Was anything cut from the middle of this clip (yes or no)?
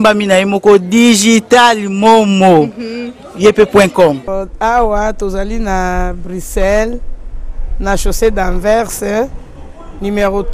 yes